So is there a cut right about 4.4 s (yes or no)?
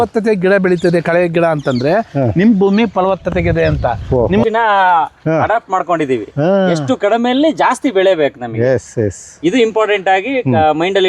yes